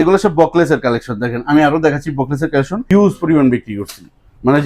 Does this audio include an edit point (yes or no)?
yes